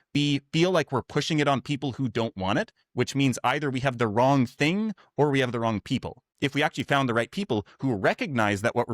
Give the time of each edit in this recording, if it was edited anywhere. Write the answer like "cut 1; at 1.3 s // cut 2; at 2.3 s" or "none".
cut 1; at 6.2 s

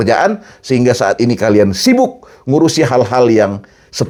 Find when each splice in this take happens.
none

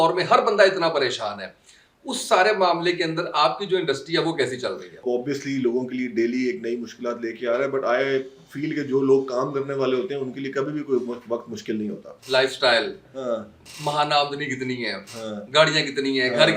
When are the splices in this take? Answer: cut 1; at 5.0 s // cut 2; at 12.1 s

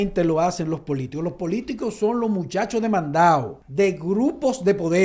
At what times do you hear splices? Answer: cut 1; at 3.6 s

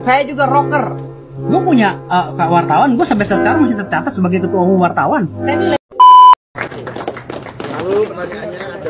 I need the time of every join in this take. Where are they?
cut 1; at 5.8 s // cut 2; at 6.5 s

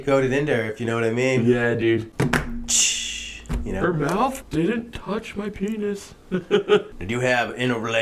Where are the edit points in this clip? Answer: cut 1; at 2.1 s // cut 2; at 4.4 s // cut 3; at 7.0 s

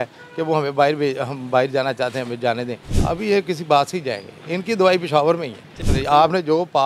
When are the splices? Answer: cut 1; at 2.9 s // cut 2; at 5.7 s

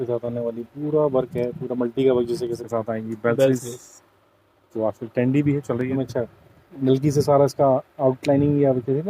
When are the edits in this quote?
cut 1; at 2.6 s // cut 2; at 6.0 s

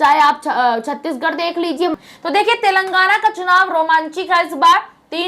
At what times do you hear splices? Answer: cut 1; at 1.9 s

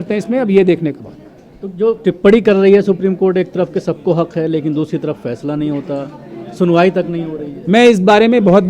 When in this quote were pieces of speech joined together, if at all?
none

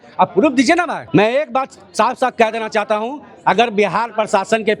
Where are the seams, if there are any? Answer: cut 1; at 1.0 s

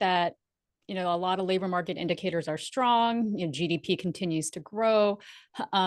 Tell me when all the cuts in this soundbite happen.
none

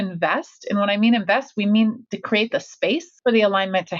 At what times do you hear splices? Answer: cut 1; at 2.0 s // cut 2; at 3.1 s

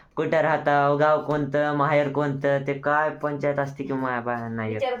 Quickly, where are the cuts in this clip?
none

